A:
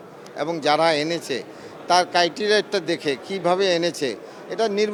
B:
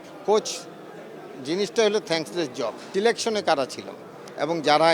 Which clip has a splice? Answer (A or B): B